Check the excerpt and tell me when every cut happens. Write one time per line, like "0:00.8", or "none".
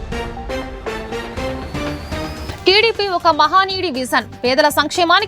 0:02.4